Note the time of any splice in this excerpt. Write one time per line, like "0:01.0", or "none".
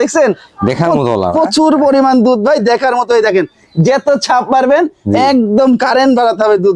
none